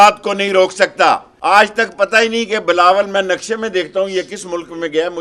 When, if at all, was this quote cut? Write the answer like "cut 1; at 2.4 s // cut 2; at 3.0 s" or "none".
cut 1; at 1.3 s